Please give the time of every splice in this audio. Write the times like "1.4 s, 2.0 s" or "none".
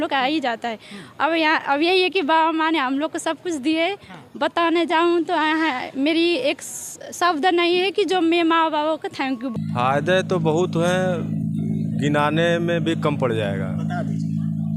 9.5 s